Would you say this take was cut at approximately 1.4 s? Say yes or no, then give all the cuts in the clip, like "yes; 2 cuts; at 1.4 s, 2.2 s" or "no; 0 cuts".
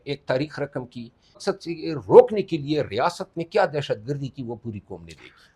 yes; 1 cut; at 1.4 s